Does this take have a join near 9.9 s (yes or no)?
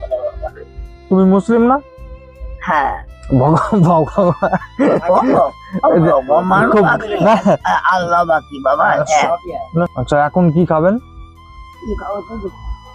yes